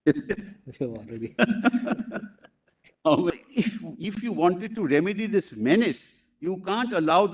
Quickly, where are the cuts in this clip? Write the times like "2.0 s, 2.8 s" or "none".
3.3 s

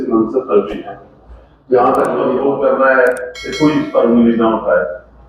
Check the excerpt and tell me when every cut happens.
2.3 s

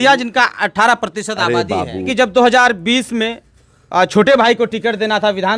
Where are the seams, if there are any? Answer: 2.0 s

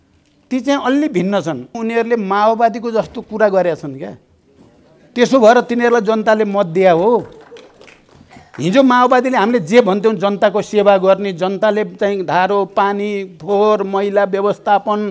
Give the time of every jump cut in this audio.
1.8 s

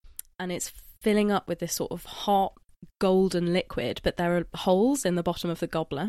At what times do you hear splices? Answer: none

